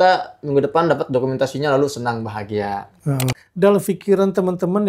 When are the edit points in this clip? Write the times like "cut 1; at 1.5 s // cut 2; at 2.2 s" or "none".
cut 1; at 3.4 s